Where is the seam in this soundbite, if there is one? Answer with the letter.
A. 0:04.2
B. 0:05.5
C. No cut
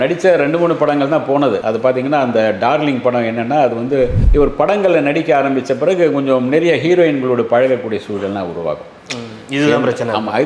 A